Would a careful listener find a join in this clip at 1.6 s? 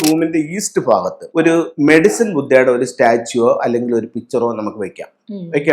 yes; 1 cut; at 1.6 s

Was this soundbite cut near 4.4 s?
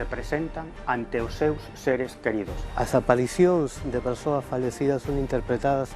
no; 1 cut; at 2.6 s

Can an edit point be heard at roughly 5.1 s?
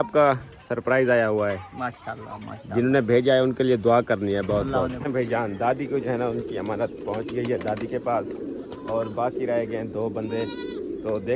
yes; 1 cut; at 5.1 s

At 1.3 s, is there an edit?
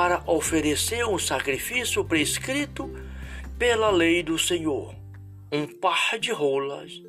no; 0 cuts

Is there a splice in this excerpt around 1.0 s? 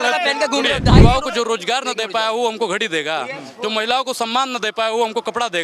yes; 1 cut; at 1.0 s

